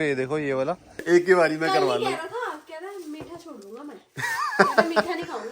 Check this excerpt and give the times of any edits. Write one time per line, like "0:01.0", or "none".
0:00.9